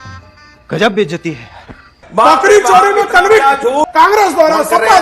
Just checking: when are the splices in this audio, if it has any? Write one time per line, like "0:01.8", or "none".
0:03.9